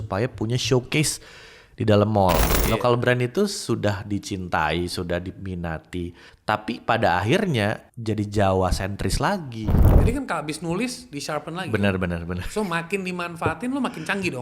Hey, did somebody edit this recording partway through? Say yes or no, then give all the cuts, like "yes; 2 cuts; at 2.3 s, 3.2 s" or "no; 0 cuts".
yes; 4 cuts; at 2.5 s, 6.3 s, 7.9 s, 9.8 s